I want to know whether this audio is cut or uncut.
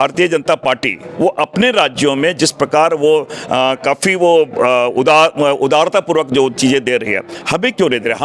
uncut